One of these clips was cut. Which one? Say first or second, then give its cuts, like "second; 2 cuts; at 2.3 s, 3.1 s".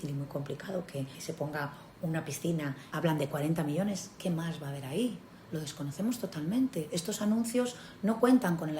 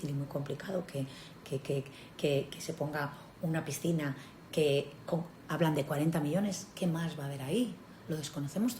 first; 2 cuts; at 1.2 s, 2.8 s